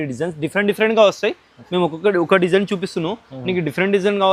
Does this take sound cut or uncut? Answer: uncut